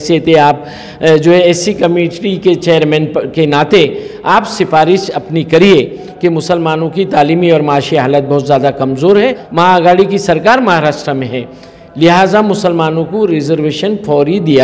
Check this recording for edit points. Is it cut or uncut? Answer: cut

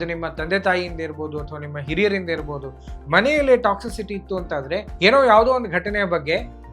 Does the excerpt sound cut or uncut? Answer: cut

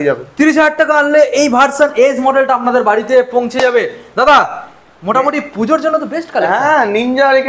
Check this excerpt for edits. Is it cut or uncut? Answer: uncut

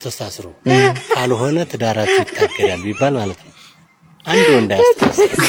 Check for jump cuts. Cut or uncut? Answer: uncut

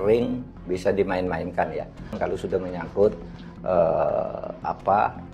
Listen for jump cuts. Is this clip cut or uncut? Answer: cut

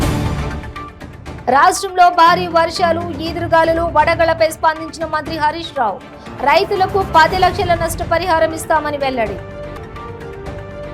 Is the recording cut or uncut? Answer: uncut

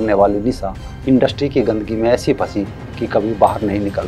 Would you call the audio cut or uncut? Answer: uncut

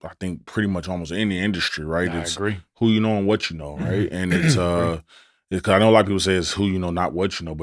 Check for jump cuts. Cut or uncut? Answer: uncut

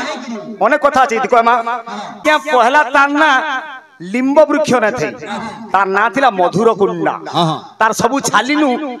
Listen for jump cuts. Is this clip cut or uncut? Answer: cut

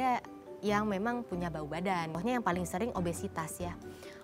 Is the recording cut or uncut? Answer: cut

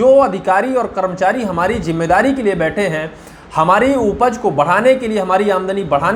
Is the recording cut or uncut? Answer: uncut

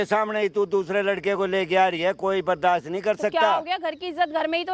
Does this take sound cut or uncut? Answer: uncut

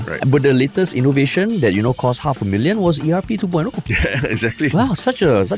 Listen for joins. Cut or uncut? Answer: uncut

